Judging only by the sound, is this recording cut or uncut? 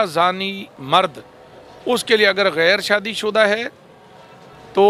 uncut